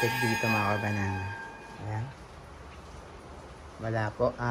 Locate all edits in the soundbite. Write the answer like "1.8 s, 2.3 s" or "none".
1.8 s